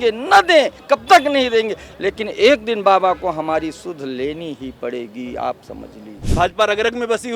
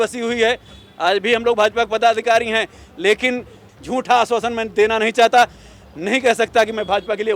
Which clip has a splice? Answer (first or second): first